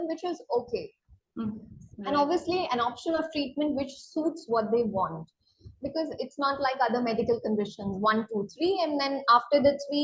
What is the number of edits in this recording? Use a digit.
1